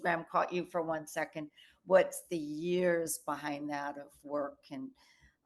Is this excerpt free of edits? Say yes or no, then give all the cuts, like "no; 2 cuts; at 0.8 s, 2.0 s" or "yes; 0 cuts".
yes; 0 cuts